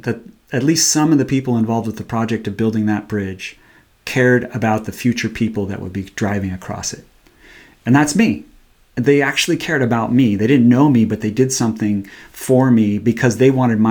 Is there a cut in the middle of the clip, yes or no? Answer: no